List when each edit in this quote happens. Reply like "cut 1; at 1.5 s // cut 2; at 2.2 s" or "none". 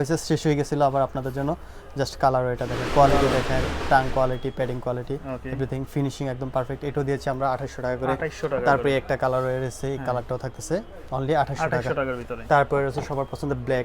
none

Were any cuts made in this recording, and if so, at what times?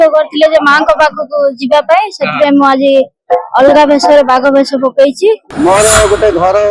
cut 1; at 5.5 s

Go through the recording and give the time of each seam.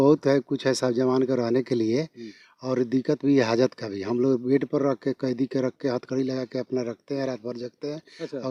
none

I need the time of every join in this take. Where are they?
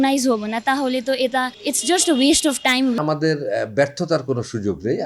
cut 1; at 1.6 s // cut 2; at 3.0 s

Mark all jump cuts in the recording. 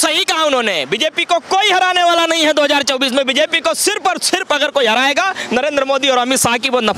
none

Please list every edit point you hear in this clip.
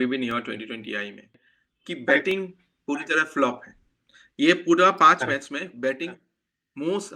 cut 1; at 1.3 s

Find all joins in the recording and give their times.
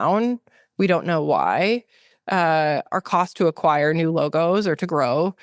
none

